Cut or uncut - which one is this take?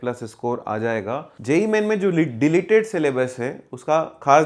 cut